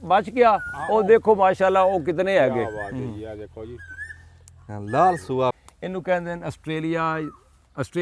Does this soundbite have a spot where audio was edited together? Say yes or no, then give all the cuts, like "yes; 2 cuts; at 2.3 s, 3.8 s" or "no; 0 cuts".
yes; 1 cut; at 5.6 s